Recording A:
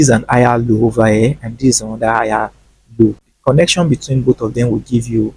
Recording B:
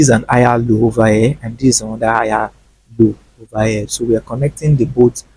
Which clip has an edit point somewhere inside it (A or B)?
A